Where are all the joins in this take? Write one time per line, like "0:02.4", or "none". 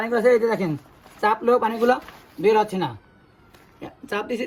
none